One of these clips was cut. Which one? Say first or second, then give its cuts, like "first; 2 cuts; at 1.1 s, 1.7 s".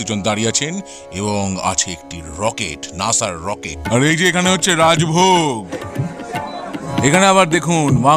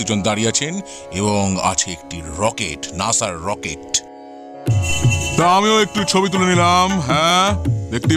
first; 3 cuts; at 3.7 s, 5.7 s, 6.9 s